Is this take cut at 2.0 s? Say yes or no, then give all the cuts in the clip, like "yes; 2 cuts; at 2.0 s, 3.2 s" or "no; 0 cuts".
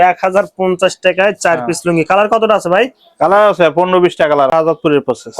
no; 1 cut; at 4.5 s